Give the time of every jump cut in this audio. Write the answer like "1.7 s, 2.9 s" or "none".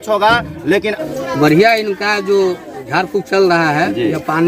0.9 s